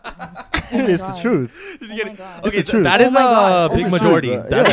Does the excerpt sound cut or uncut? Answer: uncut